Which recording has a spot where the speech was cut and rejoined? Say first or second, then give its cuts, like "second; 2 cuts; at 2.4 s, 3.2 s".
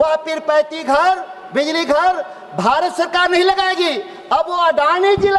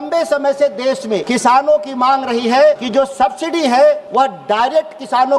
second; 3 cuts; at 1.2 s, 2.8 s, 4.0 s